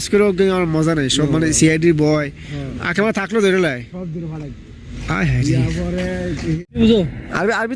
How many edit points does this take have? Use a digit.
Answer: 2